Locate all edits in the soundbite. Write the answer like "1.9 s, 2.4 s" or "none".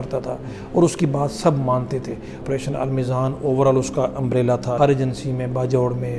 2.4 s, 4.8 s